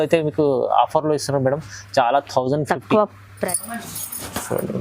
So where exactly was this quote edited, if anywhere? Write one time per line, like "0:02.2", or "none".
0:03.3